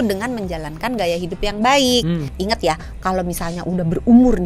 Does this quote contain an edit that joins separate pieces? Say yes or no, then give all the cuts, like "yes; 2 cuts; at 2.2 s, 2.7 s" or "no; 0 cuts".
yes; 1 cut; at 2.3 s